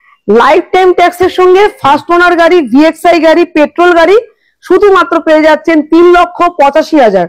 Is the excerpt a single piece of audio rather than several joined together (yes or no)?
yes